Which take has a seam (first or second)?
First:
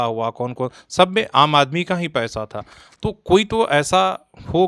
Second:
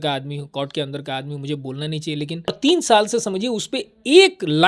second